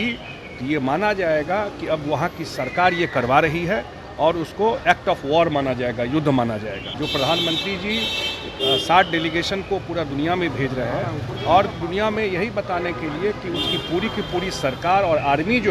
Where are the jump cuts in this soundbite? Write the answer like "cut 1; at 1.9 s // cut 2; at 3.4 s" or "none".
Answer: cut 1; at 7.0 s